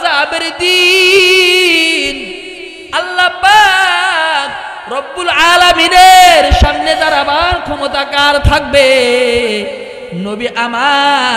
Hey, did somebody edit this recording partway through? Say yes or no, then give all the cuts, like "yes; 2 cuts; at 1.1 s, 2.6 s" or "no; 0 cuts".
no; 0 cuts